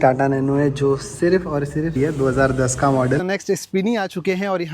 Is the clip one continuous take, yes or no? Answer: no